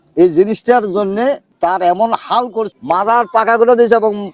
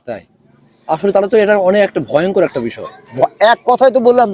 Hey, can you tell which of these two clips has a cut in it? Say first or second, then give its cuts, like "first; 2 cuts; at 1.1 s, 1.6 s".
first; 2 cuts; at 1.5 s, 2.7 s